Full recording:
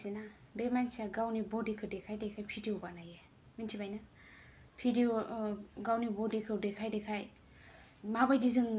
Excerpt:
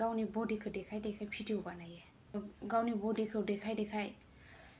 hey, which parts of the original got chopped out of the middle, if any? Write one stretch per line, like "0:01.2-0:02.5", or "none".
0:03.5-0:05.5